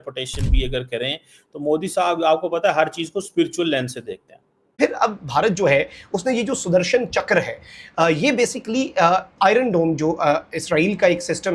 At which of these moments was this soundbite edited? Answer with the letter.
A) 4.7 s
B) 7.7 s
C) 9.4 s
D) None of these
A